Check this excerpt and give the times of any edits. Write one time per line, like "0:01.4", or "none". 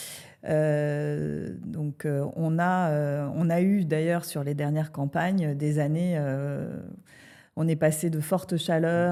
none